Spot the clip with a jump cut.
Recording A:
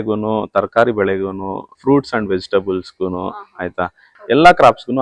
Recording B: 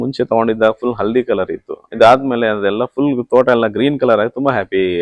A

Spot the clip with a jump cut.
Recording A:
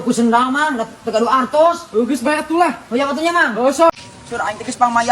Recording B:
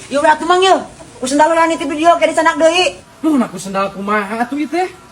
A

